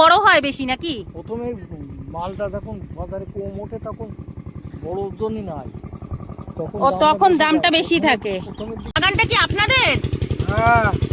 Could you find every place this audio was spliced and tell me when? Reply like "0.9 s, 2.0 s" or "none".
9.0 s